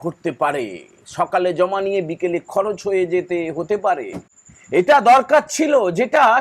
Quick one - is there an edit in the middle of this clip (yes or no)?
no